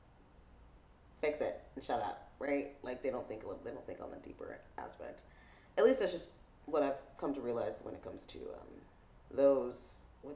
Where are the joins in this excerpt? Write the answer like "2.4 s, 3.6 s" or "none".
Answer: none